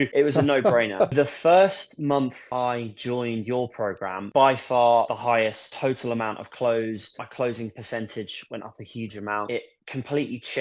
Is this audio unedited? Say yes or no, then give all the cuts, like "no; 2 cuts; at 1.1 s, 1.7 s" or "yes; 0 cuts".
no; 1 cut; at 1.1 s